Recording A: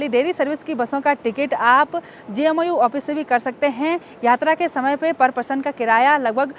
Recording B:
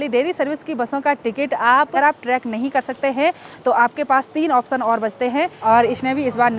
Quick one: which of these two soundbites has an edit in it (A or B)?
B